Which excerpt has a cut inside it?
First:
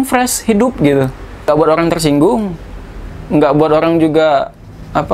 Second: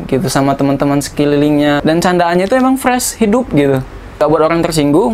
second; 1 cut; at 1.8 s

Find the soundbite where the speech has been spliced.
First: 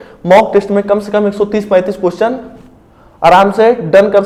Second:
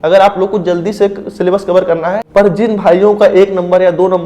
second; 1 cut; at 2.2 s

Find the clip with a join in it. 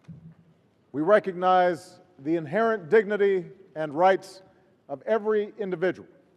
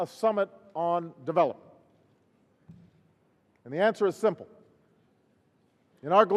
first; 1 cut; at 2.8 s

